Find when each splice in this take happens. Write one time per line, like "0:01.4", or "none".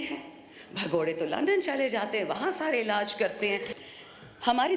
0:03.7